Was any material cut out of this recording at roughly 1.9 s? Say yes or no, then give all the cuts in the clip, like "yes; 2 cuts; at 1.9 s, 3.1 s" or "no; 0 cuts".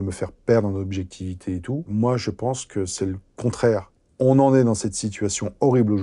yes; 1 cut; at 1.9 s